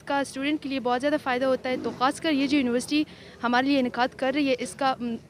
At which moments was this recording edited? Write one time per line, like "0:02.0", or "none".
none